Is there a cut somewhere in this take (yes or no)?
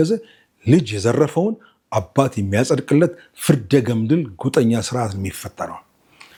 no